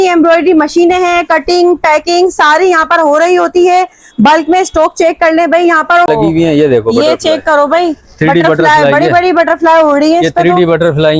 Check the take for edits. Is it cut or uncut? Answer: cut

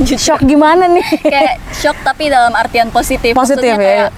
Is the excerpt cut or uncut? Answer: uncut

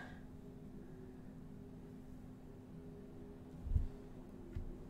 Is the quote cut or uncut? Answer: uncut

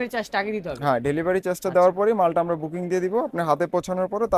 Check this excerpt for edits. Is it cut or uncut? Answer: uncut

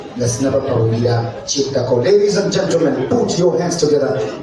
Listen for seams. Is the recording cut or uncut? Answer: uncut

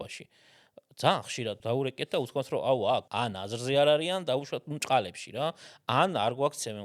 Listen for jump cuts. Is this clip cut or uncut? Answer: cut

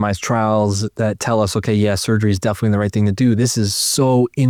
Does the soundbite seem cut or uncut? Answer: uncut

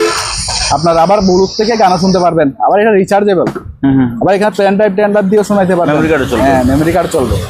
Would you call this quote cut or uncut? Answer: uncut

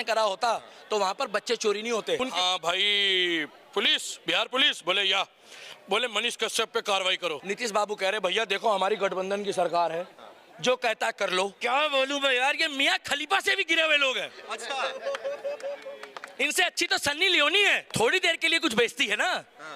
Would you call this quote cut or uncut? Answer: cut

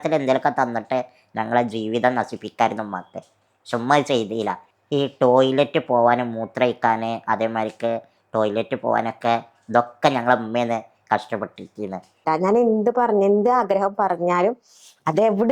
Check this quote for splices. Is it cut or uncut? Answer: cut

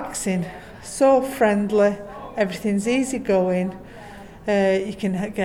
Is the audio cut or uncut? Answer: uncut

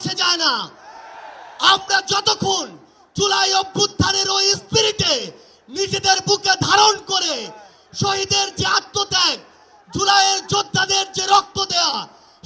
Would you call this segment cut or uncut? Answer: uncut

